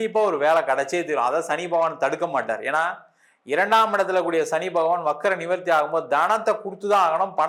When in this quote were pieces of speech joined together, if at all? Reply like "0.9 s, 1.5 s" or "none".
none

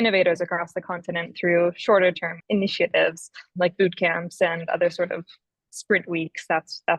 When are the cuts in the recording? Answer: 2.4 s, 3.5 s

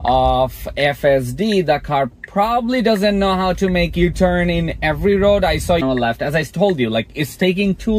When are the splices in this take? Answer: 5.8 s

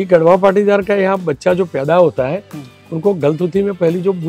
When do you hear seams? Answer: none

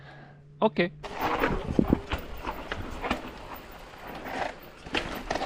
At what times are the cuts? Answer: 1.1 s

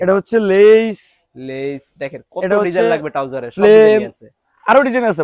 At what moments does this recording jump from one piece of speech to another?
none

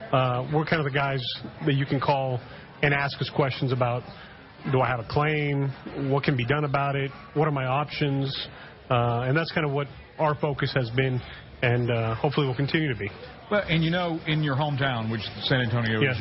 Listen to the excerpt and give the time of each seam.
4.6 s

